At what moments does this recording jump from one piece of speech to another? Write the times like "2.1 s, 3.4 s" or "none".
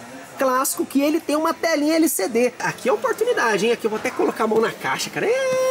2.7 s